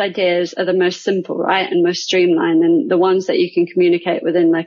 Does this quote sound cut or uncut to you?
uncut